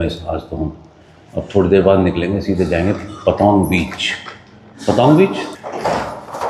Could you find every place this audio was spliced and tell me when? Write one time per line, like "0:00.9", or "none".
none